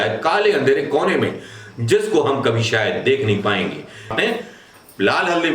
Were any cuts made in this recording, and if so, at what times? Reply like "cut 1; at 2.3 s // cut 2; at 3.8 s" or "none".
cut 1; at 4.1 s

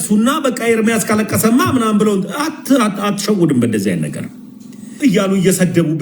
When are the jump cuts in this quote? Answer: cut 1; at 4.9 s

